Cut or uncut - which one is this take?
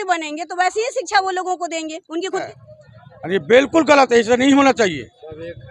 cut